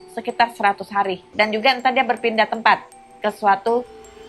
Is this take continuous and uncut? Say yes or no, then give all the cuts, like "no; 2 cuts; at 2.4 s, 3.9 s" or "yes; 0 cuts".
no; 1 cut; at 1.2 s